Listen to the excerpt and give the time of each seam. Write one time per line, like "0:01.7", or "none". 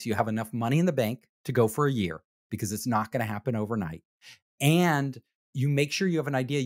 none